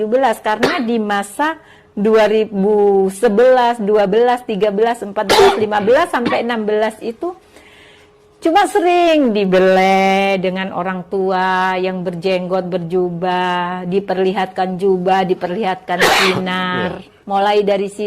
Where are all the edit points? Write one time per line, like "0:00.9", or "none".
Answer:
0:17.1